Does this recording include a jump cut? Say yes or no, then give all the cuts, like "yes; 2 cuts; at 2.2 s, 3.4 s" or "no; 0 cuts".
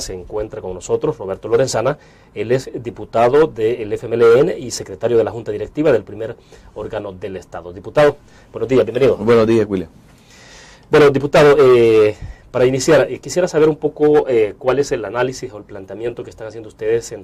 no; 0 cuts